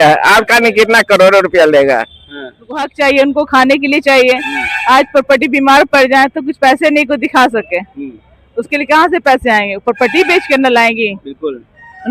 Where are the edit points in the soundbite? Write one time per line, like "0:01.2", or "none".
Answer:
0:02.9